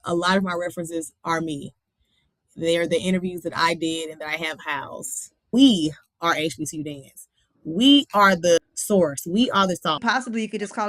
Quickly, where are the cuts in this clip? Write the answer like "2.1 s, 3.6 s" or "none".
5.5 s, 8.6 s, 10.0 s